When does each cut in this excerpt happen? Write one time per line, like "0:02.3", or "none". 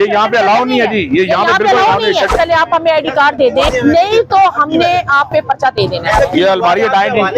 0:02.3
0:03.7
0:06.2

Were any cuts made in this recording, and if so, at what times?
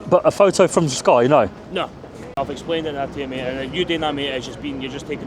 0:02.3

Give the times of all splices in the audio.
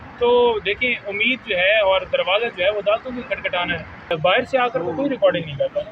0:04.1

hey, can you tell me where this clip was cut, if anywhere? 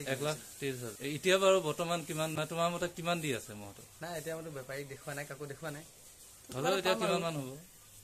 0:00.9
0:02.4

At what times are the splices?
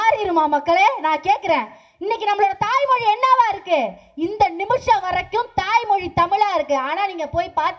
none

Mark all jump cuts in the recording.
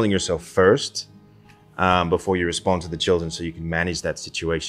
none

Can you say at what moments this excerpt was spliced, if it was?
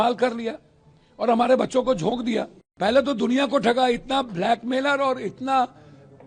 0:02.6

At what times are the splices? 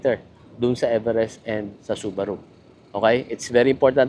none

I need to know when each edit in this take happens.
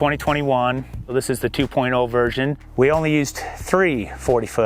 0:01.0
0:02.6

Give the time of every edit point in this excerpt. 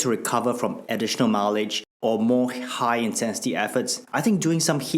0:01.8

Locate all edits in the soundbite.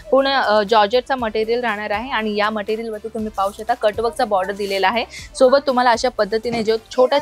none

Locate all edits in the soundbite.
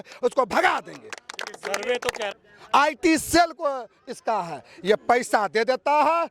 0:02.3

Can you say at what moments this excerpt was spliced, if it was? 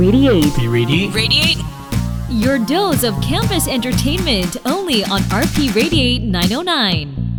none

